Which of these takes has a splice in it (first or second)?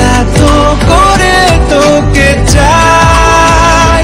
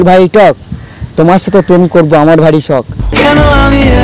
second